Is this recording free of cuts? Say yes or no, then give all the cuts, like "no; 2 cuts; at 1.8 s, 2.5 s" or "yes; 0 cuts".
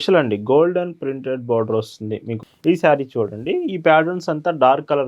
no; 1 cut; at 2.4 s